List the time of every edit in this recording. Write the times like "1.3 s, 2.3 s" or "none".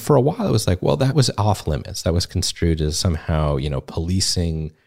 1.1 s, 3.0 s